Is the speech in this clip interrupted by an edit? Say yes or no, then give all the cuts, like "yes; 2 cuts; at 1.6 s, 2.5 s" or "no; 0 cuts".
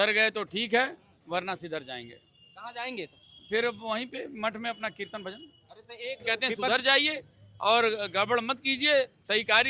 yes; 1 cut; at 6.5 s